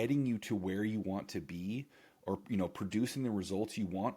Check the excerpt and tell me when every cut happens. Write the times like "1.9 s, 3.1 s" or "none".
none